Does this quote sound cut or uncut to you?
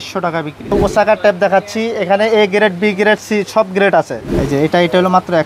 cut